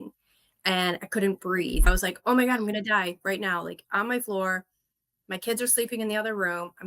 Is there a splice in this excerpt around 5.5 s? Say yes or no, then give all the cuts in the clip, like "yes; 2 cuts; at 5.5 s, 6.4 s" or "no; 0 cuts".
no; 1 cut; at 1.9 s